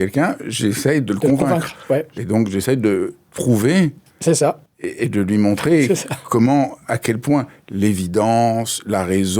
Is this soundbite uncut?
no; 1 cut; at 2.1 s

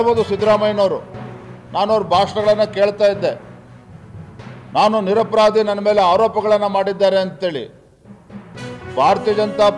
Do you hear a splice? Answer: no; 0 cuts

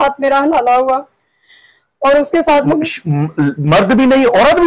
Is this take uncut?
yes; 0 cuts

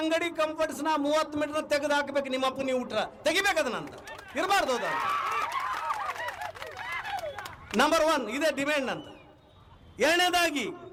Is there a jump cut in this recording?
no; 0 cuts

